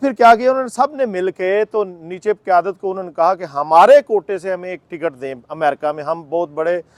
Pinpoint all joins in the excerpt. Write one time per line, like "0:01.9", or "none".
none